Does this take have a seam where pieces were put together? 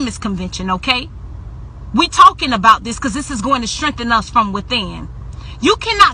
yes; 1 cut; at 4.3 s

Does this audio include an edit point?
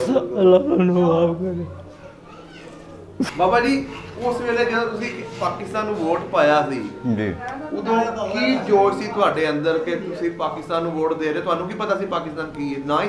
yes; 1 cut; at 3.3 s

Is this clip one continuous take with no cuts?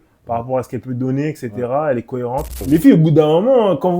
no; 1 cut; at 2.5 s

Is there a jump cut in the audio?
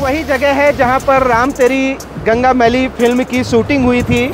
no; 0 cuts

